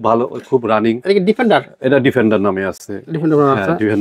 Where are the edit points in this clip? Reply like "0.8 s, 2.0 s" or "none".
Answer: none